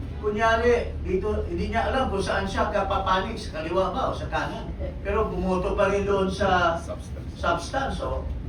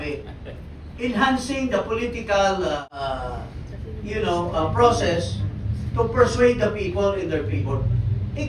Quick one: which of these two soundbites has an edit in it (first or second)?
second